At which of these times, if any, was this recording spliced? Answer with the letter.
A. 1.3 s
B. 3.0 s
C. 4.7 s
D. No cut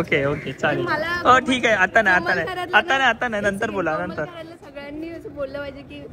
D